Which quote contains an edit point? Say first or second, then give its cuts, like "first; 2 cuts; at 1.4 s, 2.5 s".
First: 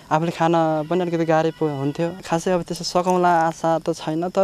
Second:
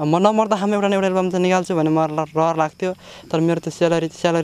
first; 1 cut; at 2.2 s